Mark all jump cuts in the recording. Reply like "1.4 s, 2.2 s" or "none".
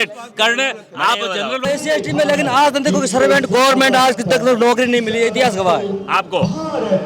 1.7 s